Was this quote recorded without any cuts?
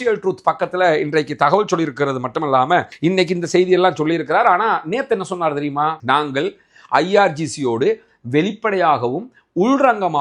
no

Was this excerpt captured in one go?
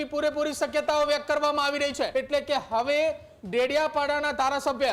no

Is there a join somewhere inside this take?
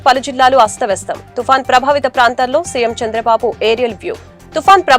no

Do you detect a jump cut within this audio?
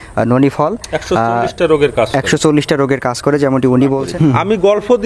yes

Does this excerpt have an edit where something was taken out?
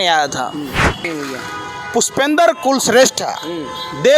yes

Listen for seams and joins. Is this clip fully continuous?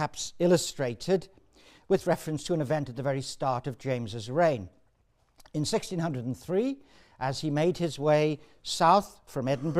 no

